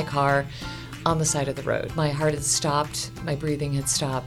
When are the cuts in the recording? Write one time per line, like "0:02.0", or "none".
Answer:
0:01.9